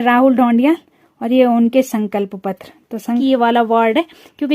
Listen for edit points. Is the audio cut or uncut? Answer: cut